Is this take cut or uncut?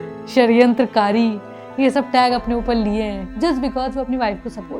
cut